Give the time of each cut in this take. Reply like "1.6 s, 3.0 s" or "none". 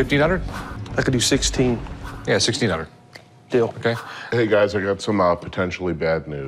4.1 s